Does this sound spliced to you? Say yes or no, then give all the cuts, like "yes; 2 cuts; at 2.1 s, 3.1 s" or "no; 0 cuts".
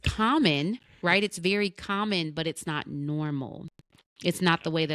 no; 0 cuts